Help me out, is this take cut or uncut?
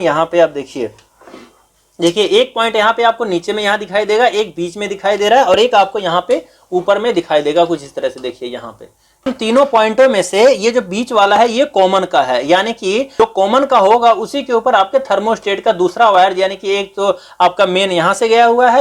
uncut